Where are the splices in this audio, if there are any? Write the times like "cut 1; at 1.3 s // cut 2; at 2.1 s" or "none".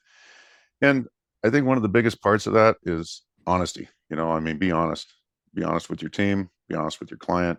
none